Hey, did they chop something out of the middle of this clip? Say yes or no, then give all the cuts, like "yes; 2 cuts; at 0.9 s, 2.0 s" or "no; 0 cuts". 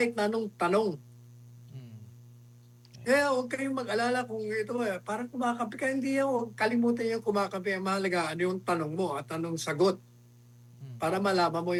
no; 0 cuts